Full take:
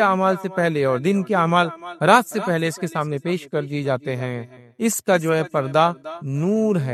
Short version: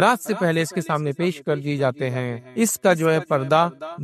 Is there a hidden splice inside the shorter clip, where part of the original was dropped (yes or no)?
yes